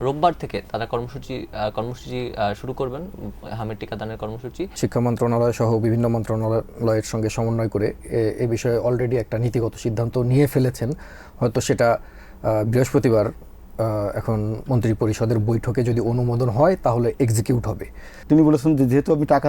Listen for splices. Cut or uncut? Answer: cut